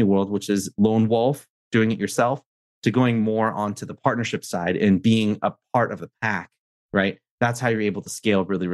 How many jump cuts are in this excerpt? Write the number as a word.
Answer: zero